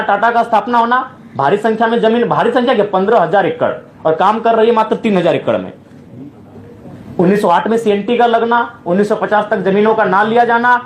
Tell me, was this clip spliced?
no; 0 cuts

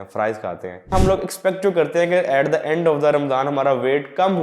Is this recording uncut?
no; 1 cut; at 0.9 s

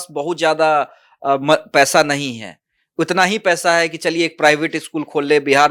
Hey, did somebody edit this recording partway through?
no; 0 cuts

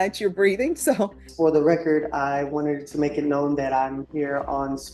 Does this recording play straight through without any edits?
no; 1 cut; at 1.2 s

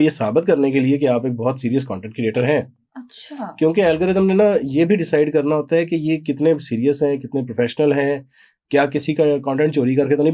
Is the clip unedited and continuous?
yes; 0 cuts

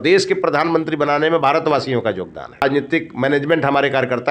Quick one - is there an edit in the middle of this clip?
yes; 1 cut; at 2.6 s

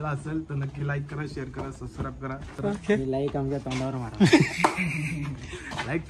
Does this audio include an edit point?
yes; 1 cut; at 2.5 s

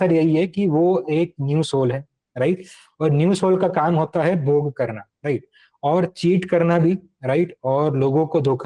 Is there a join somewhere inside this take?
no; 0 cuts

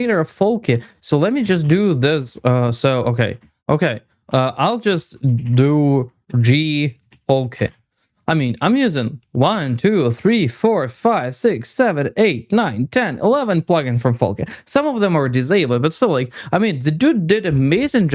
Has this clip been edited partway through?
no; 0 cuts

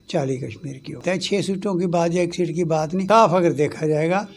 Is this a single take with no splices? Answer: no; 2 cuts; at 1.0 s, 3.0 s

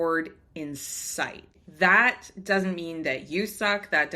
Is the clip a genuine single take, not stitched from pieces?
no; 1 cut; at 1.6 s

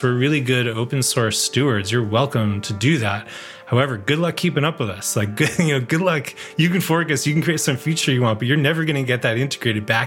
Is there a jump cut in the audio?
no; 0 cuts

